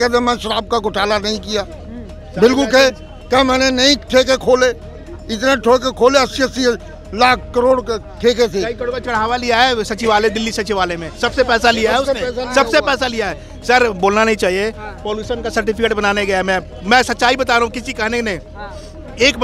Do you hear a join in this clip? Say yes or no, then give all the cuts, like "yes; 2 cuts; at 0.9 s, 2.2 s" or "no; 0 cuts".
no; 0 cuts